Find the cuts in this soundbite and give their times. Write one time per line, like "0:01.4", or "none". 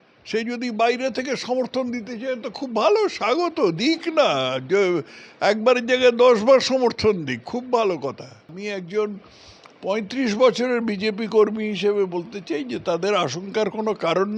0:08.6

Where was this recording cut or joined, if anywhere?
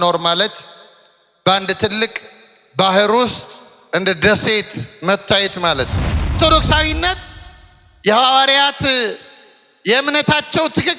0:06.4

